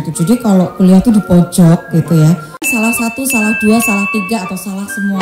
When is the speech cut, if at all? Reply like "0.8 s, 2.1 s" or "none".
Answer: 2.7 s